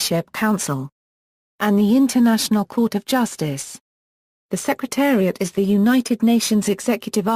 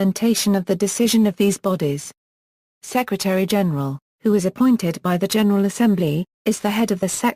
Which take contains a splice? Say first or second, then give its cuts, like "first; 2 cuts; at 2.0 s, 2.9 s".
first; 1 cut; at 1.5 s